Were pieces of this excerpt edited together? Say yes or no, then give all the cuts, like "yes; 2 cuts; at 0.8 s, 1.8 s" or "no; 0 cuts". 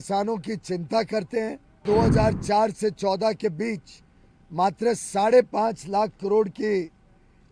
yes; 1 cut; at 1.8 s